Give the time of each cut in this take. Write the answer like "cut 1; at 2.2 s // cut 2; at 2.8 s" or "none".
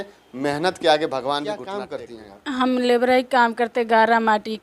cut 1; at 1.8 s